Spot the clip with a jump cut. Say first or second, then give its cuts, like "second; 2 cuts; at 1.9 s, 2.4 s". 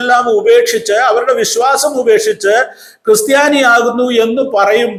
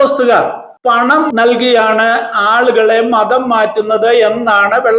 second; 1 cut; at 1.1 s